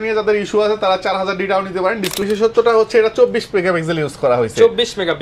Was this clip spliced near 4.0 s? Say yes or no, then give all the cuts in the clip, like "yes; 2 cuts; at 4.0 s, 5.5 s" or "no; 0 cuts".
no; 1 cut; at 2.2 s